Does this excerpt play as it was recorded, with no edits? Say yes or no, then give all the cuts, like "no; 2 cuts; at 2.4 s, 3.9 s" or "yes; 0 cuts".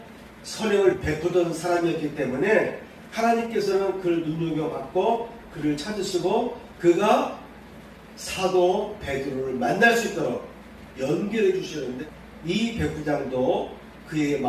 no; 1 cut; at 12.0 s